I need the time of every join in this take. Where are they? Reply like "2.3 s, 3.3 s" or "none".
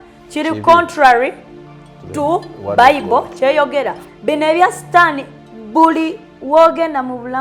4.0 s

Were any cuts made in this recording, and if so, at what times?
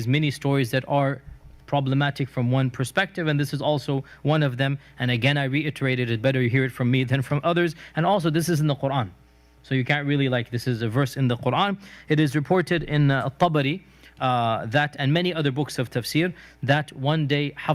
10.5 s

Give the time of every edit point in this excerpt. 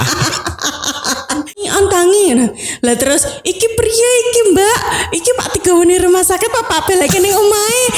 1.7 s

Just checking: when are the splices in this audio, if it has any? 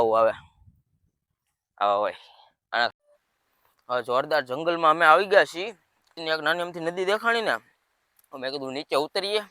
2.9 s, 6.1 s

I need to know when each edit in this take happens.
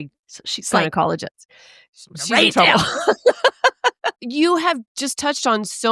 4.1 s

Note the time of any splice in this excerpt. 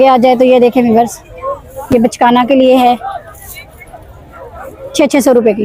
none

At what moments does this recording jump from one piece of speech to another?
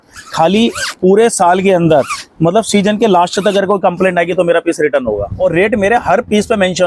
5.3 s

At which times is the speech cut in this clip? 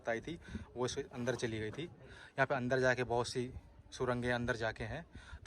none

